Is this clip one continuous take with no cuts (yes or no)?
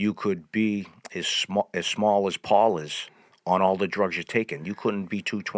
yes